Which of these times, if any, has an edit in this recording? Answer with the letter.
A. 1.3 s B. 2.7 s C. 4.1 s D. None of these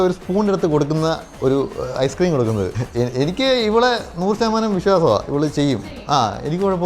B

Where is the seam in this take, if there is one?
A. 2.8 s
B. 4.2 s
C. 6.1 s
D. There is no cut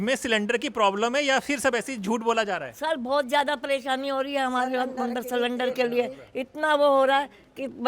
D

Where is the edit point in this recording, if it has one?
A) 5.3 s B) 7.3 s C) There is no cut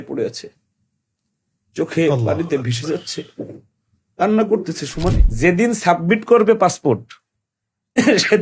A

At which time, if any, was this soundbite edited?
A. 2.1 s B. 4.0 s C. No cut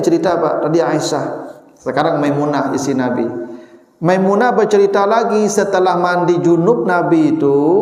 C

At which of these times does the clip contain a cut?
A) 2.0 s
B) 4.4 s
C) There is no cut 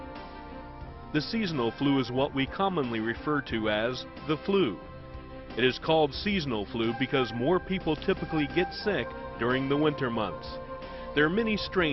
B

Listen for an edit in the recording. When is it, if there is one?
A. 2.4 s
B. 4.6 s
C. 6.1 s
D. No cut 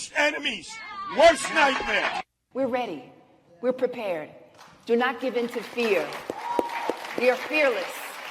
A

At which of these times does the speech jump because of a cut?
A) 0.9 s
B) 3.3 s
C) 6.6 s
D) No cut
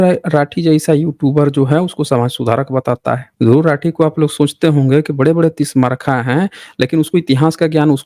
B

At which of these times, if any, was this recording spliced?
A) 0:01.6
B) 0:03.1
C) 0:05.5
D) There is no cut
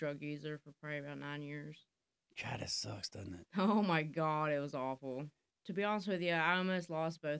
C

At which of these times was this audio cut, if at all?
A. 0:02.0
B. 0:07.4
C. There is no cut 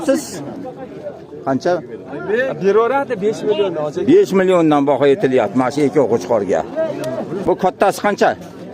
B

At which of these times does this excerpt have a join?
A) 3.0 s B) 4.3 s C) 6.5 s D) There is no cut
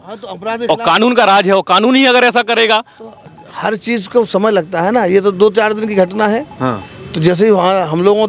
D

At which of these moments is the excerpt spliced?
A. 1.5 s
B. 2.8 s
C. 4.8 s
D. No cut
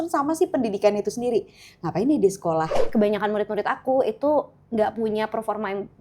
B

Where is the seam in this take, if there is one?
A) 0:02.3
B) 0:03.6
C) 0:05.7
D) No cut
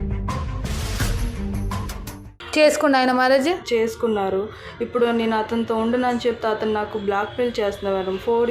A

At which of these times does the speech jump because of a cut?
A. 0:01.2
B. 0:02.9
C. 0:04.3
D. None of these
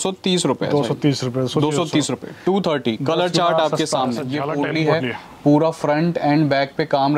C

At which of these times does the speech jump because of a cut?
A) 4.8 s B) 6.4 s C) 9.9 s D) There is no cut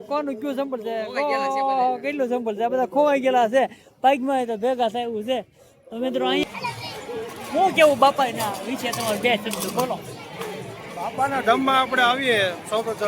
B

